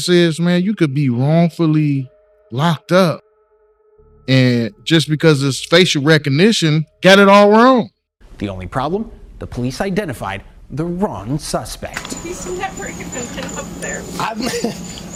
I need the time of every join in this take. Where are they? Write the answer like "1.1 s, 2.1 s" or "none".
none

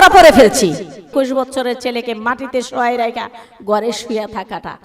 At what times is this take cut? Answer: 1.1 s

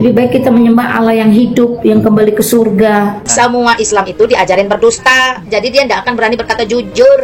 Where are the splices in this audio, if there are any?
3.2 s

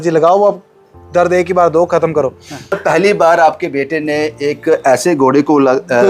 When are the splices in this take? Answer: 2.8 s

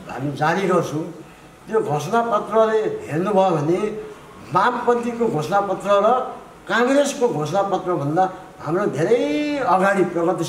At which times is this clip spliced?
none

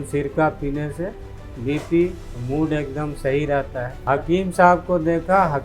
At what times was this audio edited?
4.0 s

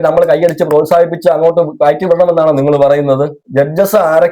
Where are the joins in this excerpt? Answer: 3.4 s

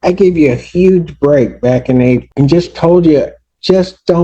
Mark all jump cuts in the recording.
2.3 s

